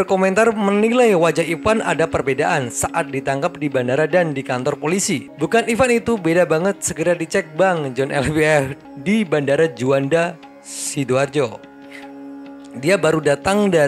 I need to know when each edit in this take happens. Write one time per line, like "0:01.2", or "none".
0:05.3
0:08.8